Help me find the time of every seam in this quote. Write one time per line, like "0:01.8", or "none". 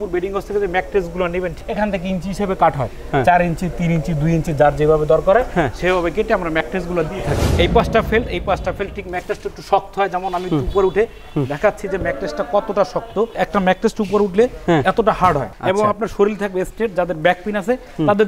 0:01.6
0:07.5
0:13.4

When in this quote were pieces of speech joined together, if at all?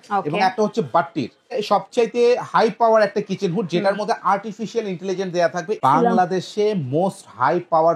0:01.6
0:05.8

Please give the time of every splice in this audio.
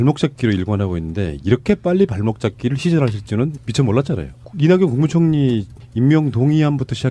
0:02.8

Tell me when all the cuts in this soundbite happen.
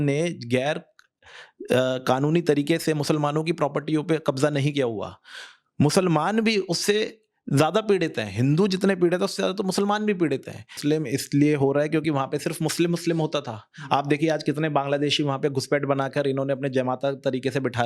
0:10.7

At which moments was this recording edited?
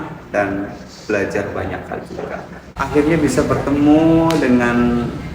0:02.7

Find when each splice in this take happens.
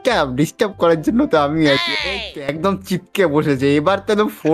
0:01.8

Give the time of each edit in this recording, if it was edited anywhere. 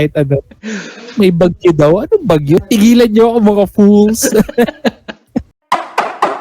0:02.6
0:05.5

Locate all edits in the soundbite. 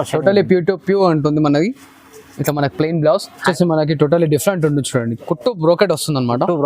0:03.5

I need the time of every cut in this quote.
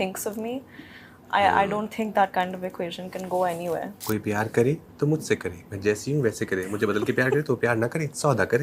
0:03.9

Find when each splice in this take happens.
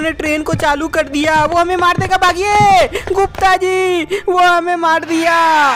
none

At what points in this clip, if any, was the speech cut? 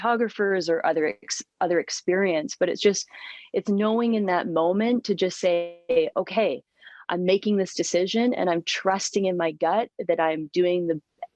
none

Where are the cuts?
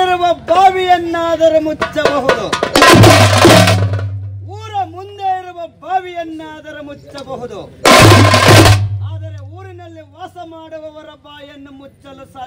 none

